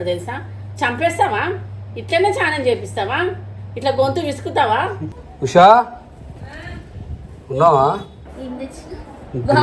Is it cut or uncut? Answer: cut